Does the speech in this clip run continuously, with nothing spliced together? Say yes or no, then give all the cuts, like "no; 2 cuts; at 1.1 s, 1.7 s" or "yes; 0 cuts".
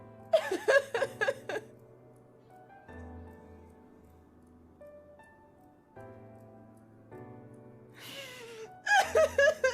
yes; 0 cuts